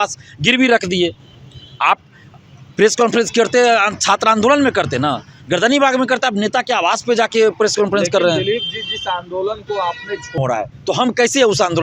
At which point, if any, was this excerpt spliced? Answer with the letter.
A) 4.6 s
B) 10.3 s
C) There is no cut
B